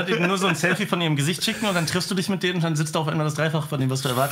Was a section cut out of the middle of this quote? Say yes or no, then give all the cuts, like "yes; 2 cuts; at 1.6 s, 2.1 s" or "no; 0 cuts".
no; 0 cuts